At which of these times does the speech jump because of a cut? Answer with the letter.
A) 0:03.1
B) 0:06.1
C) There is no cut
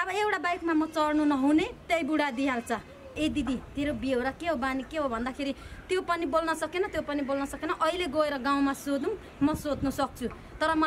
A